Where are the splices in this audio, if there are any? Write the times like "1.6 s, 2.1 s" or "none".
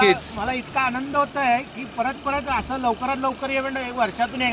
none

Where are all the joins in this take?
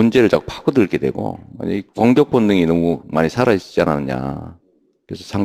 4.4 s

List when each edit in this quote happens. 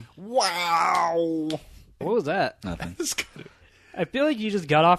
1.8 s

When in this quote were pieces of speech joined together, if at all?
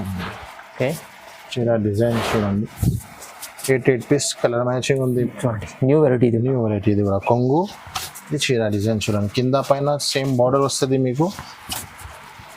5.3 s

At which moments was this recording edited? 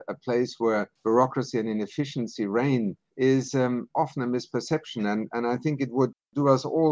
0.9 s, 3.0 s

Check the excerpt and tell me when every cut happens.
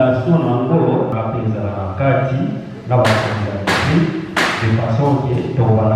1.1 s

